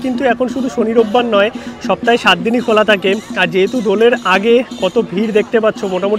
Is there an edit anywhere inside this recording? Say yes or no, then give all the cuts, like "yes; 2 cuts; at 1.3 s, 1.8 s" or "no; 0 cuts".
no; 0 cuts